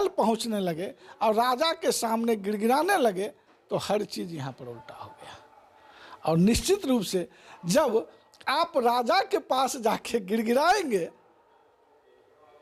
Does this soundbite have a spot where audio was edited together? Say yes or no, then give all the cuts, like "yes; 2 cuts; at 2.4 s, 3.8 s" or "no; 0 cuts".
no; 0 cuts